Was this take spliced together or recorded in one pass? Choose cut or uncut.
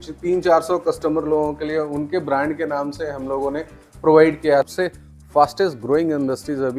cut